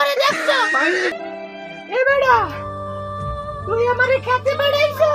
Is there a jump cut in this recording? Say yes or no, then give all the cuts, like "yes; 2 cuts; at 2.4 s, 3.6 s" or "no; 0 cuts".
yes; 1 cut; at 1.2 s